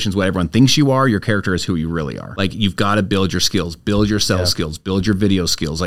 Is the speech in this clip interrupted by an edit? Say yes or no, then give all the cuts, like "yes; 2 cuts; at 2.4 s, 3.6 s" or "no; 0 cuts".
yes; 1 cut; at 2.2 s